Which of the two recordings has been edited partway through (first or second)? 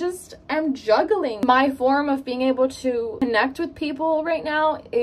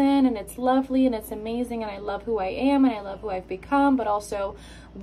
first